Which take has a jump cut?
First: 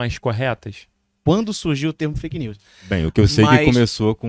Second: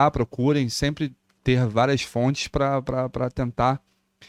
first; 1 cut; at 1.2 s

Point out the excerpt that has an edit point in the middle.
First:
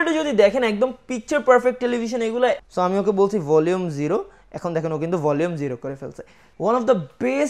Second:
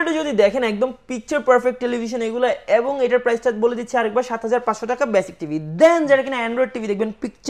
first; 2 cuts; at 2.6 s, 6.4 s

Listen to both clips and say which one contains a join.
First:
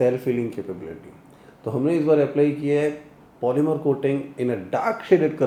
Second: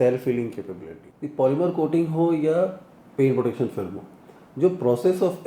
second; 1 cut; at 1.2 s

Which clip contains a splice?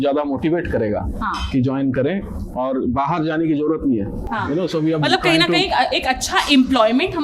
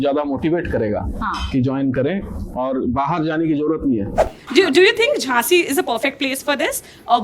second; 1 cut; at 4.3 s

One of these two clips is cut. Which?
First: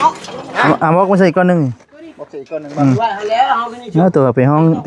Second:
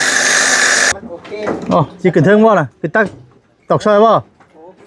second; 1 cut; at 0.9 s

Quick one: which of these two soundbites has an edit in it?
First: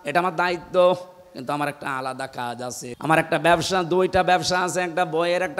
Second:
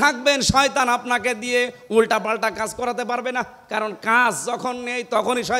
first; 1 cut; at 2.9 s

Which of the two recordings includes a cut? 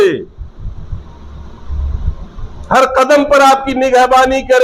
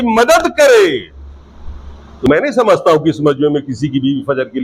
second; 1 cut; at 2.3 s

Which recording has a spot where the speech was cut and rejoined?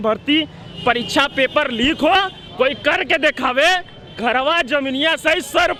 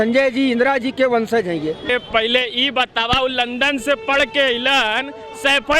second; 1 cut; at 1.9 s

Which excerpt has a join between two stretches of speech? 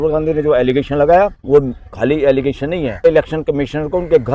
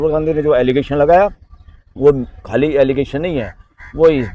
first; 2 cuts; at 1.4 s, 3.1 s

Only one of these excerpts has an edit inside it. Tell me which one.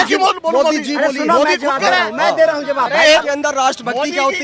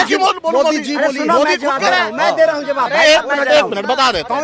first; 1 cut; at 3.2 s

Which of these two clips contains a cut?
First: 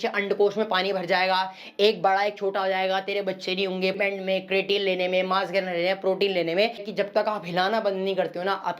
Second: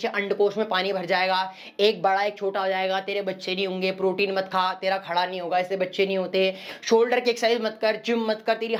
first; 2 cuts; at 4.0 s, 6.9 s

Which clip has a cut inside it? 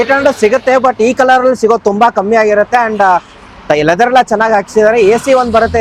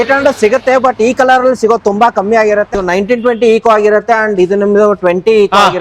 second; 1 cut; at 2.7 s

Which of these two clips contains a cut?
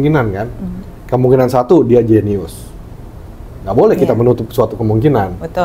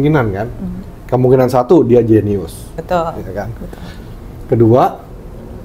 second; 1 cut; at 2.8 s

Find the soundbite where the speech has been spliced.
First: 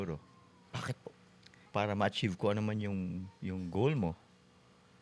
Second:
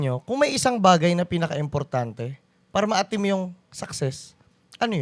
first; 1 cut; at 1.5 s

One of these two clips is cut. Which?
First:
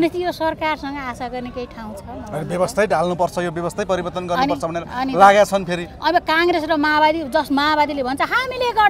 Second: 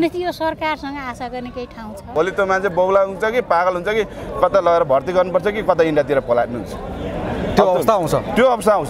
second; 1 cut; at 2.1 s

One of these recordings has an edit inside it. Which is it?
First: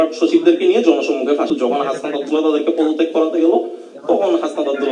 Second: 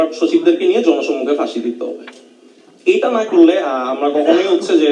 first; 1 cut; at 1.5 s

